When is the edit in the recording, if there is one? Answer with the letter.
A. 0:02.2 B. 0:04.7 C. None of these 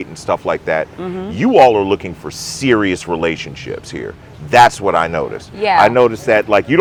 C